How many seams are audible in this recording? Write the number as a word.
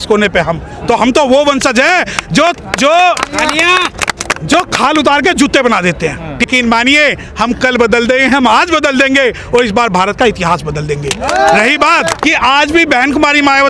two